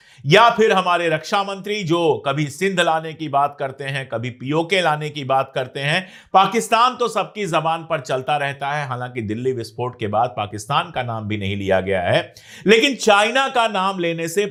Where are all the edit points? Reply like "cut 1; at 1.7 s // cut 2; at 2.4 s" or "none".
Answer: none